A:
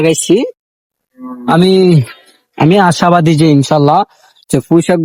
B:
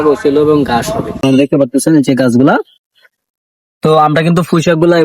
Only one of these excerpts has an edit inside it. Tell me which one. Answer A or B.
B